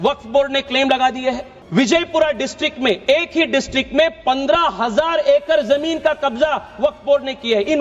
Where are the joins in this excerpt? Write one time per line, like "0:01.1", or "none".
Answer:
0:01.5